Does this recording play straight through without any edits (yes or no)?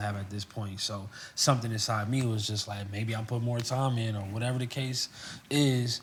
yes